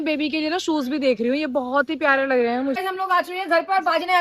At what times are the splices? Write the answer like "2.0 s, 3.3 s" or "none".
2.8 s